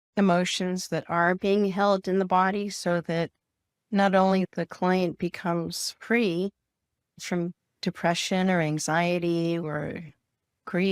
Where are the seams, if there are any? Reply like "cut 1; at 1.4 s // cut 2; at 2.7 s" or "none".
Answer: cut 1; at 4.5 s // cut 2; at 7.2 s